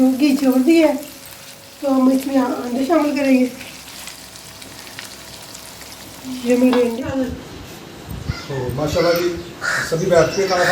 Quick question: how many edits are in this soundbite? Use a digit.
1